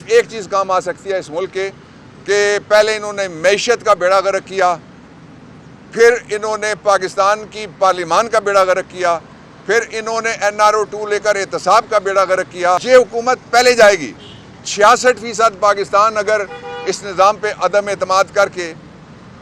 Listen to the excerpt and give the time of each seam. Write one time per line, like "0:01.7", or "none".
0:12.8